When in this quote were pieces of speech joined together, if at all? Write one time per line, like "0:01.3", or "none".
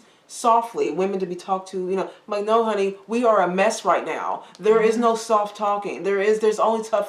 none